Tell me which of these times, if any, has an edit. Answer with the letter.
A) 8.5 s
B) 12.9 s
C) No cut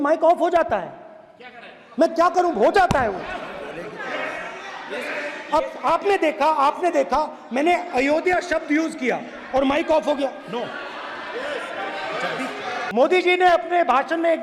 B